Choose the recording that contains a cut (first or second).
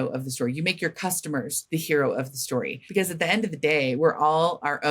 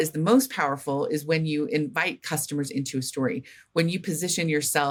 first